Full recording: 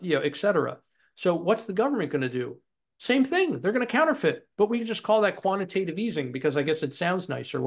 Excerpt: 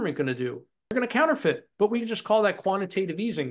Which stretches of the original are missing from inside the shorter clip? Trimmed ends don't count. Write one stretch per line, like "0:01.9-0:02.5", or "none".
0:02.9-0:03.7